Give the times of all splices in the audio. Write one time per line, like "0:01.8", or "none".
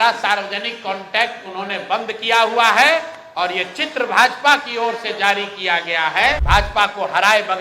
0:06.4